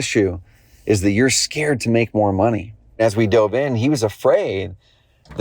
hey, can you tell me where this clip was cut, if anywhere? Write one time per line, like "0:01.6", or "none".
0:03.0